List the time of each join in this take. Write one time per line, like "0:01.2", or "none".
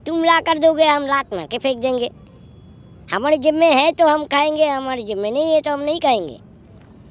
none